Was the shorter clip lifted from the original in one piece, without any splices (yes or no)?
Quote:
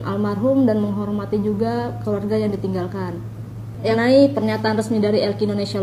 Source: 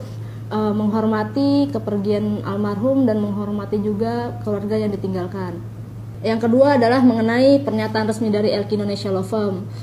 no